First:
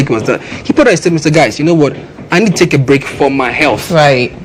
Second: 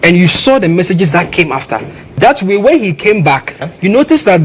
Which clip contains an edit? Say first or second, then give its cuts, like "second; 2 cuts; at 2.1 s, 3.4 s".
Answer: second; 2 cuts; at 2.0 s, 3.6 s